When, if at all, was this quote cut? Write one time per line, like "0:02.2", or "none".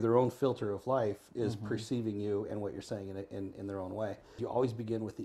0:04.3

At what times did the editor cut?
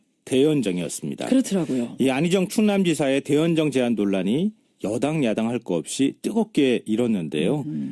0:04.0

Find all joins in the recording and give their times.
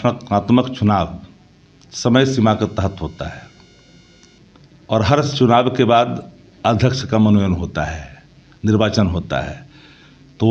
none

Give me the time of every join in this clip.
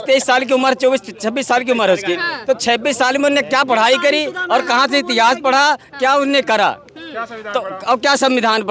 none

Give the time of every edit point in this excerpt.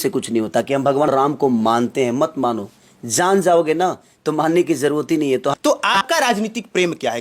0:01.1
0:05.5

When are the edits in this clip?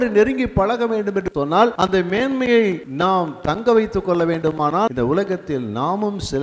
0:01.4
0:02.9
0:04.9

